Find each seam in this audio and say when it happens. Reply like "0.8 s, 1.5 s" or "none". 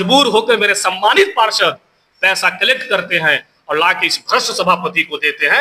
none